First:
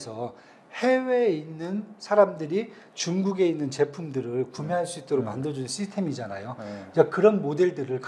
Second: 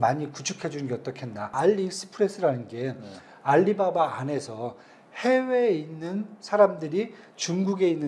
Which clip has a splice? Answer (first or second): second